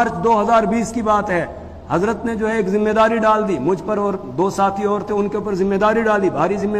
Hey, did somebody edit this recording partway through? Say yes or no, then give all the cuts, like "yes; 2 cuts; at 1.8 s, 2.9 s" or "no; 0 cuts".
no; 0 cuts